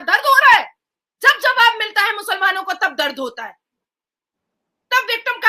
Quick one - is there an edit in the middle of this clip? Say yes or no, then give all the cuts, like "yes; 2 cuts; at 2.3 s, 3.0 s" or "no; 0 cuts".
no; 0 cuts